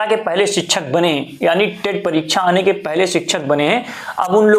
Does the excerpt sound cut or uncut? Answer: uncut